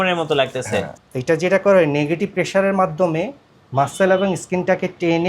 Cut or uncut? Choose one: cut